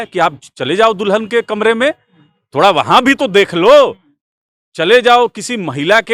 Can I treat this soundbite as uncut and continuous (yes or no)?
yes